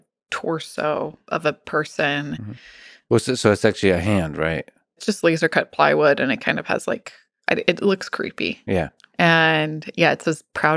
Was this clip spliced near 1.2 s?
yes; 3 cuts; at 1.2 s, 5.0 s, 9.0 s

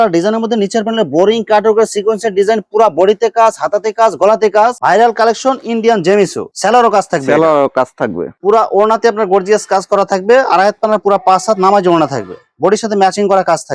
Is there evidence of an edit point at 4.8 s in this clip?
no; 0 cuts

